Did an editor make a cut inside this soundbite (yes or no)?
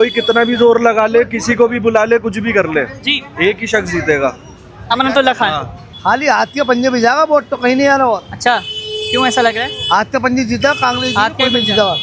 yes